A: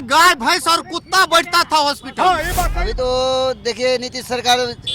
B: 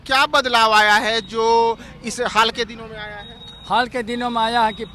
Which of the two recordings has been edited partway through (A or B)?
A